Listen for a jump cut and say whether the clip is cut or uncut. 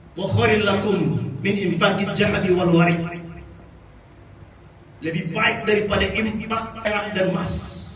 cut